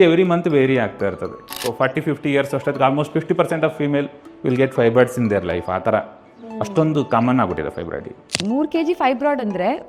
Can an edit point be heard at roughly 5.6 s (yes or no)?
no